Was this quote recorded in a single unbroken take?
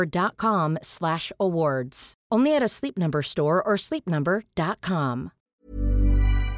no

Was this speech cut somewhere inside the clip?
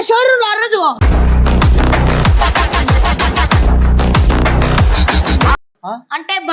yes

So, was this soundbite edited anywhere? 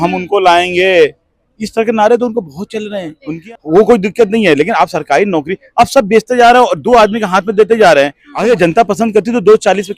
yes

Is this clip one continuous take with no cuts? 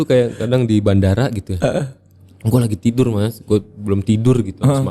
yes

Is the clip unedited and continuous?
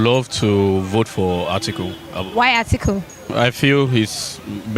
no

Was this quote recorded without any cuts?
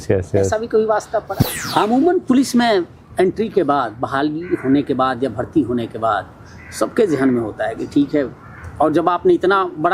no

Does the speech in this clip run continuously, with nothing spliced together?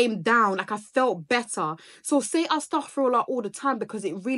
yes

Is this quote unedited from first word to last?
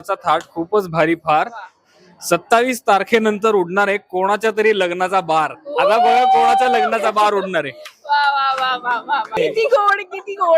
no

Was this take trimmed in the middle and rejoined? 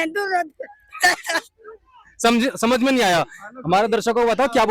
no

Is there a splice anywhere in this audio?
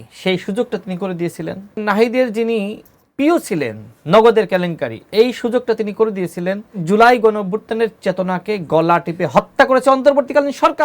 yes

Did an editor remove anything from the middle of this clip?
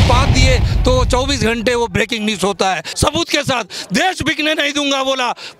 yes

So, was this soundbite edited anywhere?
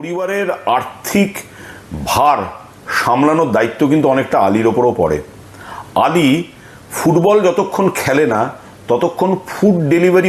no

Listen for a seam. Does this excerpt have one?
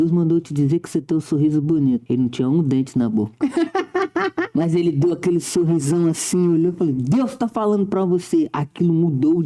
yes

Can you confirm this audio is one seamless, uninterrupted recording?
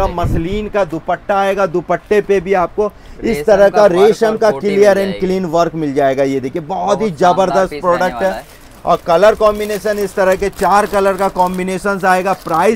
yes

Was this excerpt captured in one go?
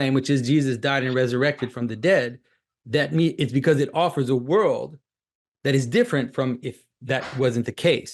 yes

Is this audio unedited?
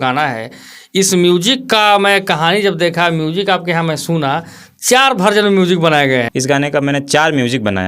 no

